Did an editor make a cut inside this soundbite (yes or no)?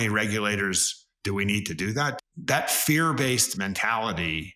yes